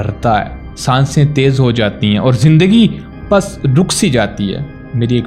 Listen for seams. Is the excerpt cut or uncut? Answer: uncut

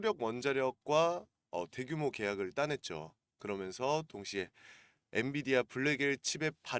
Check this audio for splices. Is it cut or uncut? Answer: cut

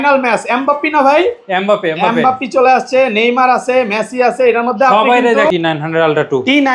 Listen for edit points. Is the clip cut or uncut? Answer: cut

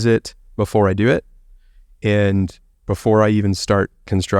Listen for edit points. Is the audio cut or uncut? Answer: uncut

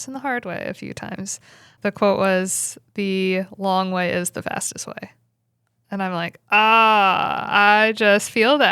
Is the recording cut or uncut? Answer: cut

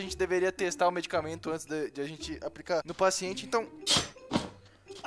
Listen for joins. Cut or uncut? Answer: uncut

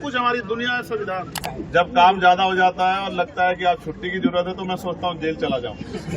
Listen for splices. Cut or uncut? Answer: cut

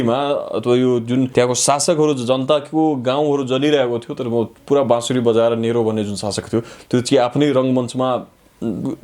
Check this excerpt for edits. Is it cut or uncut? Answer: cut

